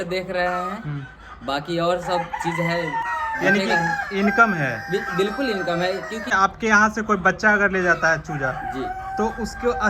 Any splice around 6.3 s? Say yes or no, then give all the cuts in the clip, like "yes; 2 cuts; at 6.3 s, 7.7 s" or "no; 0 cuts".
yes; 2 cuts; at 3.1 s, 6.3 s